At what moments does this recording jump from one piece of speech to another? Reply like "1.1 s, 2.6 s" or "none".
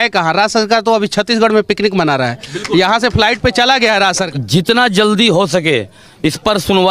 4.3 s